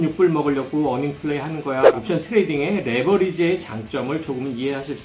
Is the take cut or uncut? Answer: cut